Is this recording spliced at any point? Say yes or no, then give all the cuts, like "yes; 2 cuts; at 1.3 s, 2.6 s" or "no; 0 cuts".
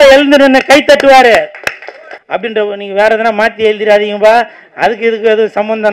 yes; 1 cut; at 2.1 s